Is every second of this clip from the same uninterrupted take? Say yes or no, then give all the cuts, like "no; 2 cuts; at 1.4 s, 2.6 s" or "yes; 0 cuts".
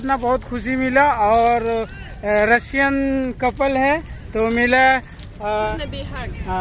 no; 1 cut; at 5.7 s